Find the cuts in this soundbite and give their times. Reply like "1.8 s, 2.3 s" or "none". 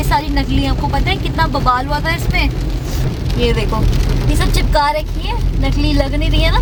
none